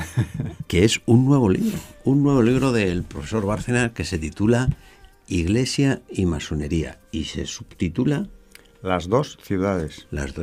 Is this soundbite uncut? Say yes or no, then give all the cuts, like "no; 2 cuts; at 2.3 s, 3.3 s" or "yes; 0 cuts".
no; 1 cut; at 0.9 s